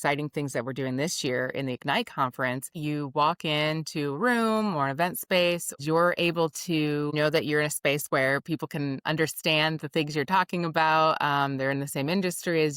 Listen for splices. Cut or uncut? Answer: cut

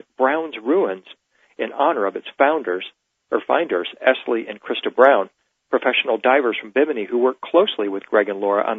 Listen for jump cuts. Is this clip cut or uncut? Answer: uncut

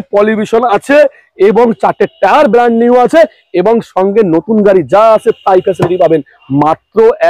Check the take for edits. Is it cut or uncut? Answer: uncut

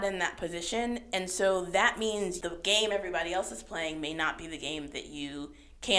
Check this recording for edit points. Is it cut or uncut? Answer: cut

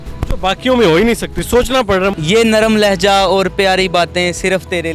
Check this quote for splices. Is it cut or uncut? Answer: cut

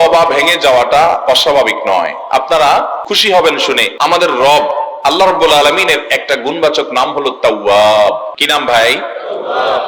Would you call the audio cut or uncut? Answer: cut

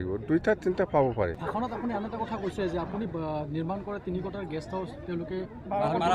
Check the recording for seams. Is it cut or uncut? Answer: cut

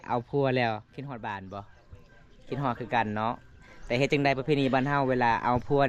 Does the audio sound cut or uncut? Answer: uncut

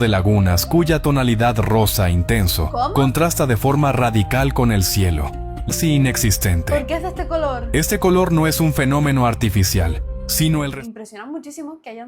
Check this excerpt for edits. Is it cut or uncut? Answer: cut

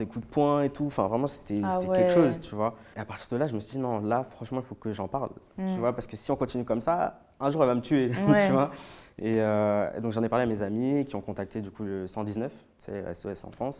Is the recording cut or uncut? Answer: uncut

